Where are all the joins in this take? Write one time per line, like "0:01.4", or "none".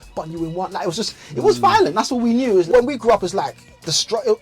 0:02.7